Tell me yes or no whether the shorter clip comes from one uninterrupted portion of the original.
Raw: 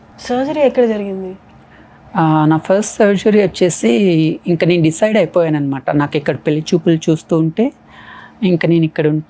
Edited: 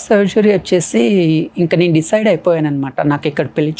yes